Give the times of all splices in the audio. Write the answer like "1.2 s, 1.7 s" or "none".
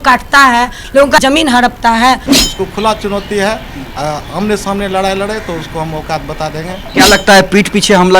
2.3 s, 6.8 s